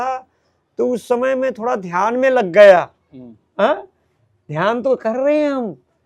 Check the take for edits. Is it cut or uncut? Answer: uncut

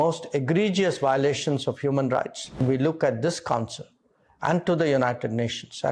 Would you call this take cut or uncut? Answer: cut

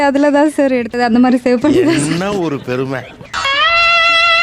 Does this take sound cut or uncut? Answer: uncut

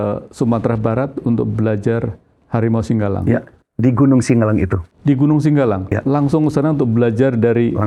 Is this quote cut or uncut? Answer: uncut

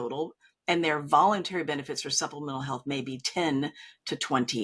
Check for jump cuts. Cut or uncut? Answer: uncut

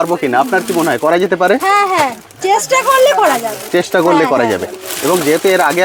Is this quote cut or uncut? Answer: uncut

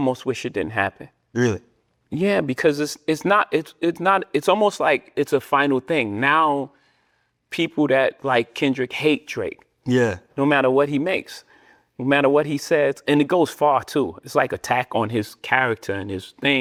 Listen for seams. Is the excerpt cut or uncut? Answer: uncut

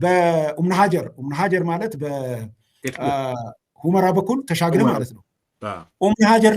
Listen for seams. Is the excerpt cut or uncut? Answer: uncut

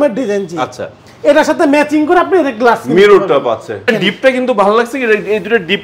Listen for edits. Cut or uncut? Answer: cut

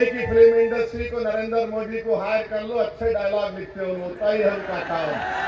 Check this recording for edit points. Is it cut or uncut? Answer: uncut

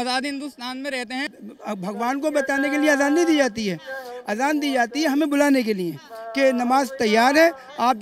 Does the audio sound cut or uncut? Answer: cut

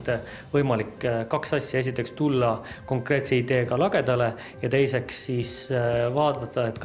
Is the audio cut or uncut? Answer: uncut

